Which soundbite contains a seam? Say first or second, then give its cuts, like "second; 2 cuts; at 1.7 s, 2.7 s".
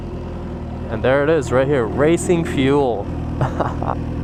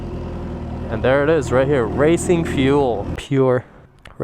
second; 1 cut; at 3.2 s